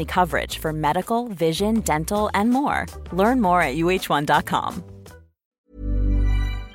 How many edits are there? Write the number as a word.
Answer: one